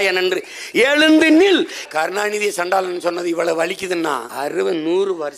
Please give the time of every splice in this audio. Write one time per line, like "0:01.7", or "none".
0:01.8
0:04.3

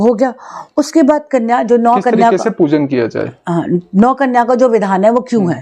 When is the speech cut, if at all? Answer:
none

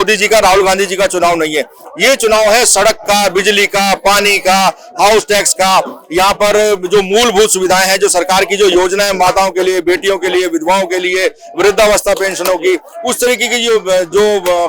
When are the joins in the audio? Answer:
none

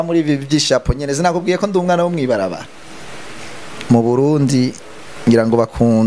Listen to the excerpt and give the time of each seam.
0:02.6

